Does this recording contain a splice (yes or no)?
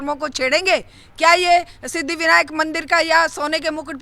no